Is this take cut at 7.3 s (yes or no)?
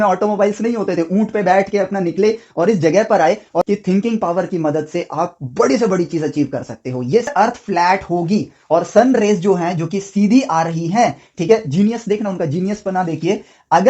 yes